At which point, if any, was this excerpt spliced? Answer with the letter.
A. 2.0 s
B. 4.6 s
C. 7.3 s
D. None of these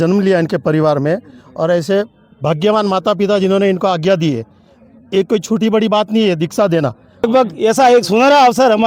C